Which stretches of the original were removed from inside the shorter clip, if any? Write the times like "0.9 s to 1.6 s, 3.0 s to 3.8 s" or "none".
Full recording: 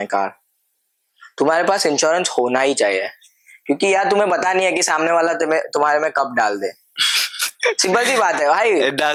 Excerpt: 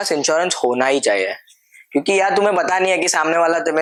none

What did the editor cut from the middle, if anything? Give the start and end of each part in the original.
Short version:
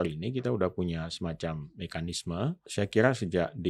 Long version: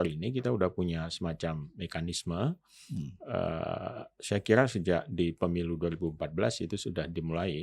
2.6 s to 4.2 s

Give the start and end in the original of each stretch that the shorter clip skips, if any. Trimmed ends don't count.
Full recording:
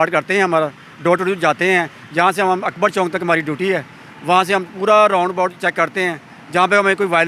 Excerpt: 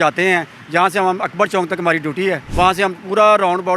3.9 s to 4.2 s

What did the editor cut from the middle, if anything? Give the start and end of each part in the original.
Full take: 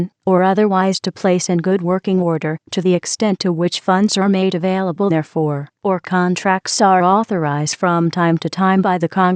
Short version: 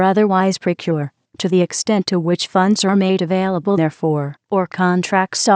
1.4 s to 2.3 s

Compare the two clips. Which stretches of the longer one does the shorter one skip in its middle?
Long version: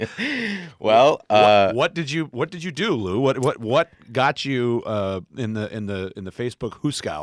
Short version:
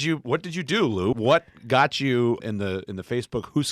3.2 s to 3.6 s, 4.8 s to 5.7 s

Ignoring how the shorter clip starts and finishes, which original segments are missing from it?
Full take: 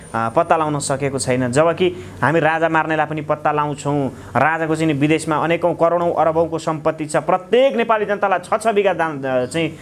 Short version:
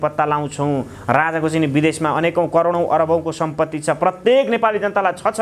none

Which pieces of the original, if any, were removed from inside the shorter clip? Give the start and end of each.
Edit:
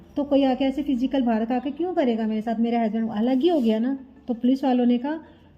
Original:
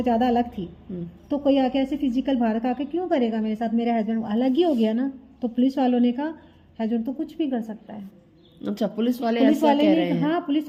none

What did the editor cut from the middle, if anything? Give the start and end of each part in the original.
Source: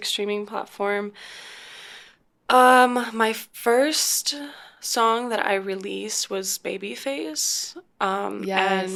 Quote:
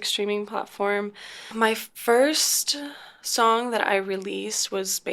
1.5 s to 3.1 s

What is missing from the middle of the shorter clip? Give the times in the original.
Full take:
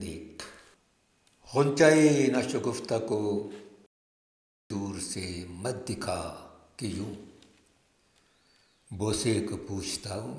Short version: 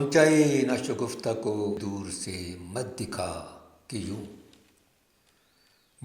3.4 s to 4.7 s

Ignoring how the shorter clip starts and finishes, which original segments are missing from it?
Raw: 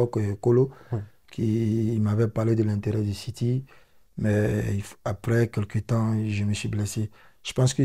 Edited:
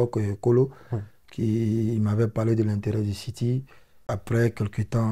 3.9 s to 4.9 s

